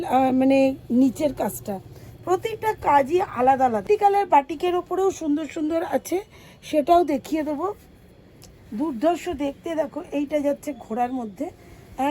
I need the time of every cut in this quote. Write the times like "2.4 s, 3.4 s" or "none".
3.8 s, 8.6 s